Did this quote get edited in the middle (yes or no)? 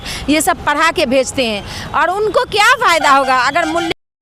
no